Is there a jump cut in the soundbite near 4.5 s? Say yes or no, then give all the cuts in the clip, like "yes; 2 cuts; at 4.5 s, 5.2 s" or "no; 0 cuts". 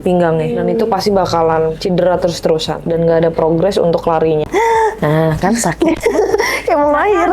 yes; 1 cut; at 4.5 s